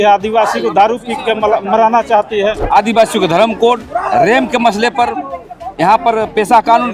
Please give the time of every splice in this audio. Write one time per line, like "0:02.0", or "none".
0:02.6